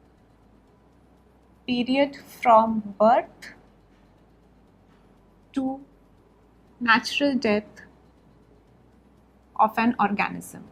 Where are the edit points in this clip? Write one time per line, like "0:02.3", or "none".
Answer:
0:02.0